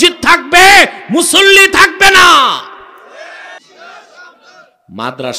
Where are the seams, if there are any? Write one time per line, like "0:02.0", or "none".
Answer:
0:03.6